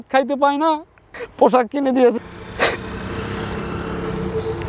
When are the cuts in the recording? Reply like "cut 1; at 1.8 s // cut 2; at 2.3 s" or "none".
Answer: cut 1; at 2.2 s